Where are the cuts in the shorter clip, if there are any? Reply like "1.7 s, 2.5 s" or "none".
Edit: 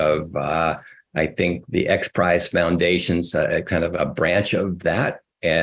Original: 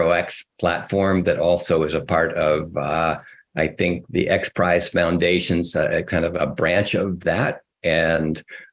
none